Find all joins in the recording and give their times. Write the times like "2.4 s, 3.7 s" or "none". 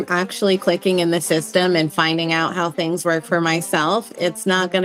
none